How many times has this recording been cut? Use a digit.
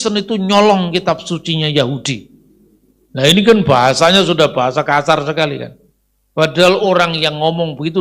0